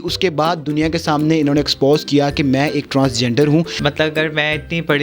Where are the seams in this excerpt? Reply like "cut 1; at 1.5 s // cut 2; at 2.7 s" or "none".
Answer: cut 1; at 3.7 s